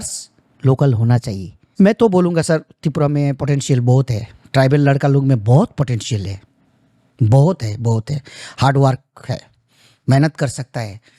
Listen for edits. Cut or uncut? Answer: cut